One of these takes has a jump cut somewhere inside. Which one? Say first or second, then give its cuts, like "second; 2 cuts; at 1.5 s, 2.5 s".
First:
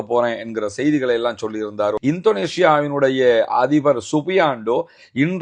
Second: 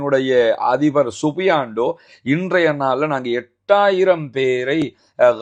first; 1 cut; at 2.0 s